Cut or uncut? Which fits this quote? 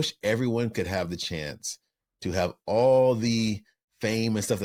uncut